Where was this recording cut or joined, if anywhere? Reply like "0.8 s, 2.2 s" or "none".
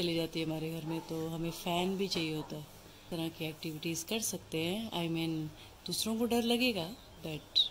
3.1 s